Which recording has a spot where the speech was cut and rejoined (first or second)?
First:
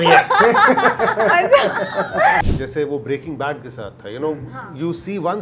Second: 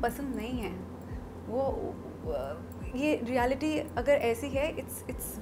first